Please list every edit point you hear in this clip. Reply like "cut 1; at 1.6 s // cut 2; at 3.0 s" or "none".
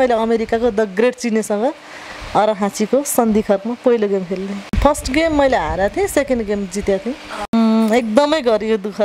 cut 1; at 4.8 s // cut 2; at 7.5 s